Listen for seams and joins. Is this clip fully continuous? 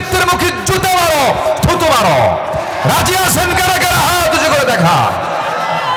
yes; 0 cuts

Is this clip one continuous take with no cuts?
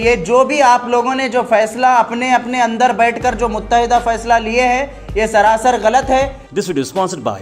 no; 1 cut; at 6.4 s

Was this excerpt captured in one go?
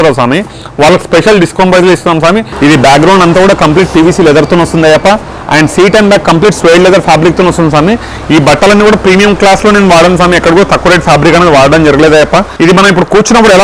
no; 2 cuts; at 2.5 s, 12.5 s

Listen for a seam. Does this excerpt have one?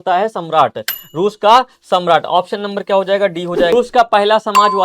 yes; 1 cut; at 3.7 s

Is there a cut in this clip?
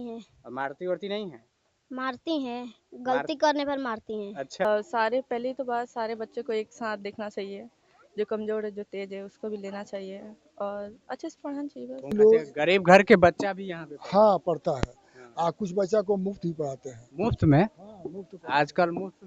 yes; 2 cuts; at 4.6 s, 12.1 s

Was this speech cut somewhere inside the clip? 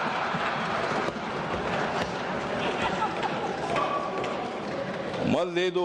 no; 0 cuts

